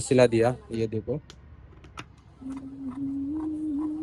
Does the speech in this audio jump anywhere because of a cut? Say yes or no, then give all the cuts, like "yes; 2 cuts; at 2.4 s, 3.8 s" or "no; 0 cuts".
no; 0 cuts